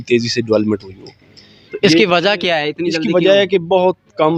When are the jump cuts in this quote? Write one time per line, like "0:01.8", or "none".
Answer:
none